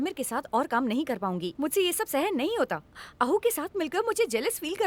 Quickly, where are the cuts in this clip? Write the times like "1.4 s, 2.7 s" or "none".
none